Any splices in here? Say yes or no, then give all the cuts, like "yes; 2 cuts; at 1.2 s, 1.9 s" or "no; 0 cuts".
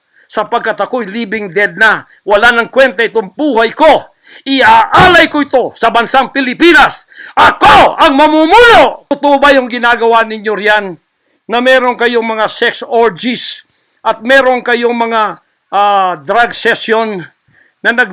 yes; 1 cut; at 9.1 s